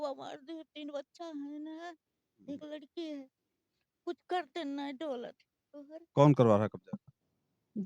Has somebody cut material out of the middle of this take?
yes; 1 cut; at 6.1 s

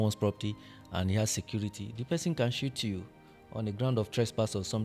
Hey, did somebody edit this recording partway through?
no; 0 cuts

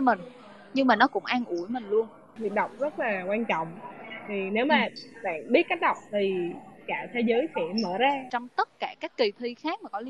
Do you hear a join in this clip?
yes; 2 cuts; at 2.3 s, 8.3 s

